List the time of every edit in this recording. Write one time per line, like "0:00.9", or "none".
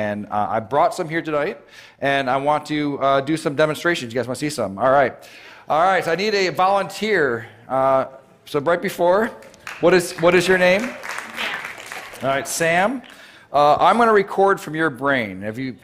0:14.9

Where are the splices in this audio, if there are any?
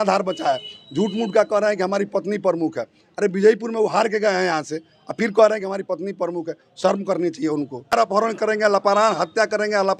0:07.9

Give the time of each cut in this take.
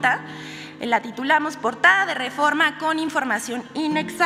none

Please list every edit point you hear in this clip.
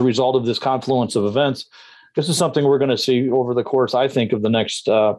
none

